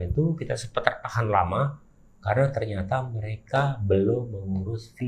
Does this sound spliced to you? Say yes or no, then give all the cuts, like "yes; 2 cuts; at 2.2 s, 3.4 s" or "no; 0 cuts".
no; 0 cuts